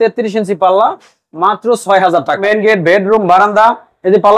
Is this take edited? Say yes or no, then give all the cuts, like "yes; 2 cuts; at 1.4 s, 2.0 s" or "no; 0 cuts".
yes; 1 cut; at 2.4 s